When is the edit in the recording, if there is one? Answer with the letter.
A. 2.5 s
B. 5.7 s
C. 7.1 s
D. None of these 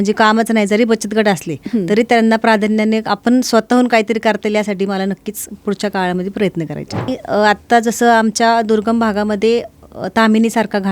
C